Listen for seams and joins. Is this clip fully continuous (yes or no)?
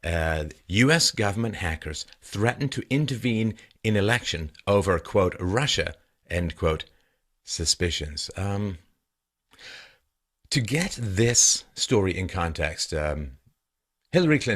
no